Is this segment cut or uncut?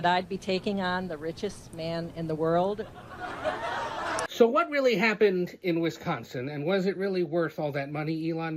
cut